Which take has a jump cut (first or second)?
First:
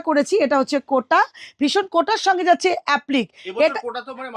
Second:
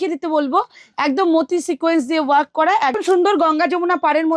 second